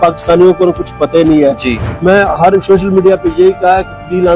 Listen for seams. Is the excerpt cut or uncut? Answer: cut